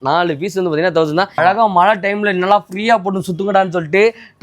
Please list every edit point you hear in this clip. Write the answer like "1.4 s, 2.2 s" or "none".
1.4 s